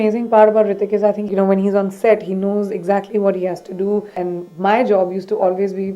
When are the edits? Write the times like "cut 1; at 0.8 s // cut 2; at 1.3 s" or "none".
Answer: cut 1; at 1.2 s // cut 2; at 4.2 s